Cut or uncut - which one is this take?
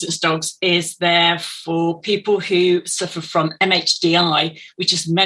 uncut